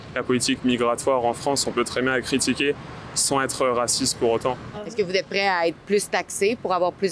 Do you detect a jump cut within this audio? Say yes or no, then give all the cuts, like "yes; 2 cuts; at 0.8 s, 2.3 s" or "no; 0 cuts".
yes; 1 cut; at 4.7 s